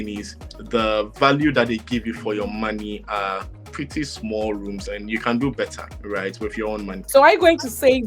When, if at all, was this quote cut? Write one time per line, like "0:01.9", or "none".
0:05.9
0:07.0